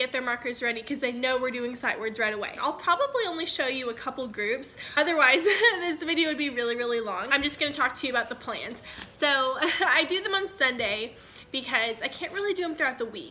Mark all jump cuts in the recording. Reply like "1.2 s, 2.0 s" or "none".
none

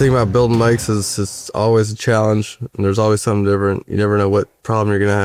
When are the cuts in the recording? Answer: none

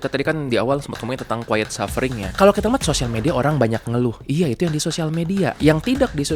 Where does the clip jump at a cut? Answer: 2.2 s, 5.6 s

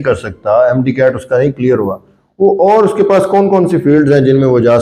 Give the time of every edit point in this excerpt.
none

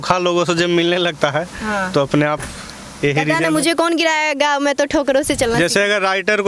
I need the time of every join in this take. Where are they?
none

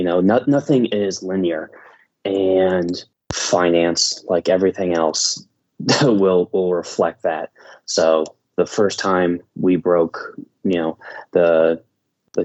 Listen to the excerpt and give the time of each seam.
none

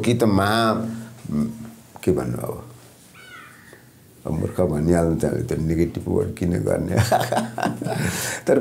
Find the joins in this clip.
none

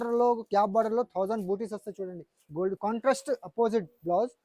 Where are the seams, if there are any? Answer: 2.8 s

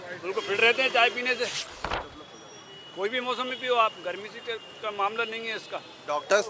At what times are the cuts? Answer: 1.8 s

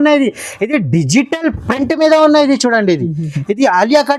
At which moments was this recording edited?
none

